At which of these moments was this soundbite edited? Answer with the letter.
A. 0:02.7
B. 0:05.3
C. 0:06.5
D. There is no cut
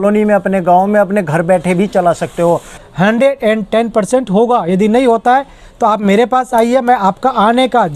A